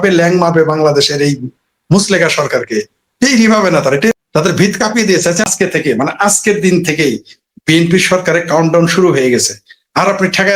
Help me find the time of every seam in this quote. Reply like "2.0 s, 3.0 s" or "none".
4.1 s, 5.4 s